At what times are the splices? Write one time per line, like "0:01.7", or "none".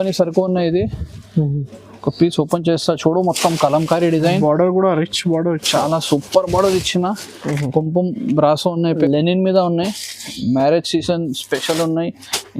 0:09.0